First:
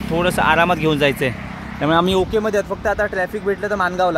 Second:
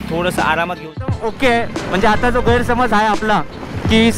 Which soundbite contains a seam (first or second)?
second